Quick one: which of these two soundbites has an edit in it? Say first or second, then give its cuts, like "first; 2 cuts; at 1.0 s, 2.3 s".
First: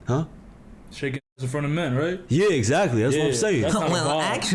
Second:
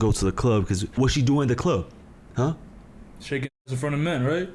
second; 1 cut; at 1.0 s